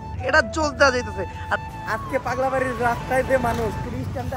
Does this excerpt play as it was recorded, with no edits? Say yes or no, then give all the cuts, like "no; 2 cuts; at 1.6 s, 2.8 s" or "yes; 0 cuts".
no; 1 cut; at 1.6 s